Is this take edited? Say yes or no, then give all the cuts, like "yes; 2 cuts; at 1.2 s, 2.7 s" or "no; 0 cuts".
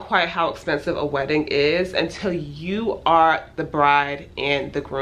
no; 0 cuts